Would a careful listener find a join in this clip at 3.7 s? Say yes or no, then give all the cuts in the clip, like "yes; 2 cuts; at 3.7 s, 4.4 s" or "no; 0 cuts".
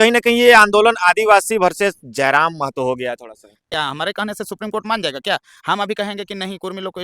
yes; 1 cut; at 3.7 s